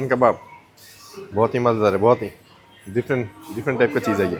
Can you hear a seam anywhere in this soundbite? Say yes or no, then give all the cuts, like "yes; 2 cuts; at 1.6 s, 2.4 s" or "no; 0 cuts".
no; 0 cuts